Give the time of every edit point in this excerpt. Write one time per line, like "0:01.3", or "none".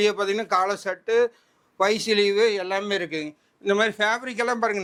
none